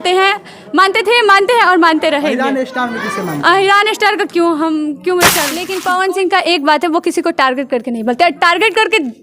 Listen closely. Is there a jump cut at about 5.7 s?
yes; 1 cut; at 5.7 s

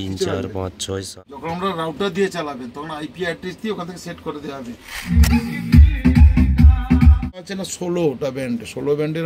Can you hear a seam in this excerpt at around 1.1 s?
yes; 3 cuts; at 1.1 s, 5.2 s, 7.3 s

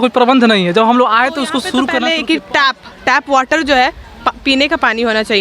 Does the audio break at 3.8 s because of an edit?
no; 1 cut; at 1.9 s

